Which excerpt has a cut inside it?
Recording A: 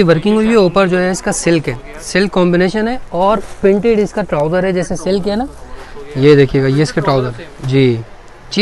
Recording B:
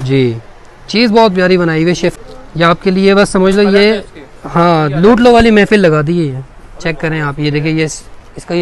B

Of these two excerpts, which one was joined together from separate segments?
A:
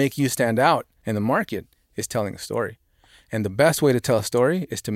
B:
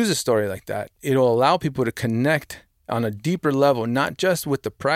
A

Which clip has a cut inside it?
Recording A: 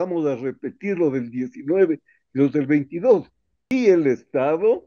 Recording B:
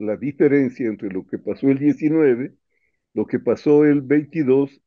A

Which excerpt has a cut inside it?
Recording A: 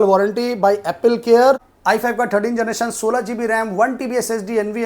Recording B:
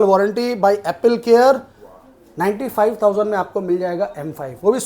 A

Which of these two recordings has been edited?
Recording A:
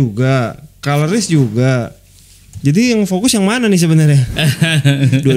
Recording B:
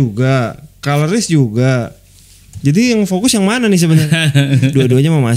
B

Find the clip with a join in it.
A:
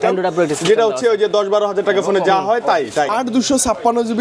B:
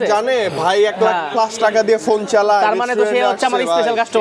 A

